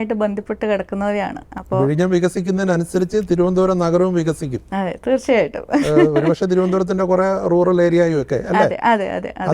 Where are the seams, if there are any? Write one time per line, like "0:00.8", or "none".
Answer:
none